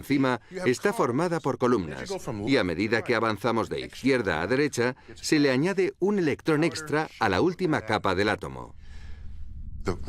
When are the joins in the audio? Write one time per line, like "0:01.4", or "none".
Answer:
0:07.9